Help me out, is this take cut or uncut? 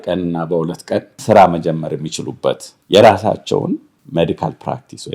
cut